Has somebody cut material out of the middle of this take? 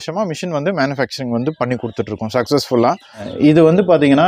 yes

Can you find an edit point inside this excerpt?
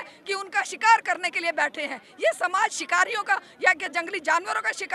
no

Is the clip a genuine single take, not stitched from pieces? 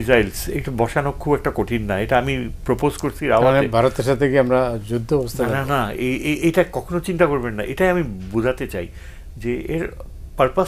yes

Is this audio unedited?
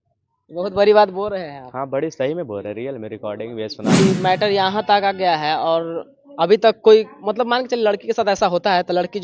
no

